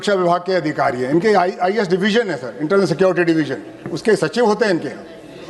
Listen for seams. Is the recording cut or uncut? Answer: uncut